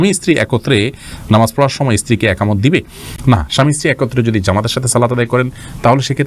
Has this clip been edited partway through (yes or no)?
no